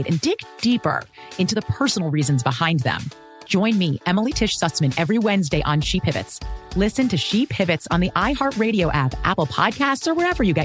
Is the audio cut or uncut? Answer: uncut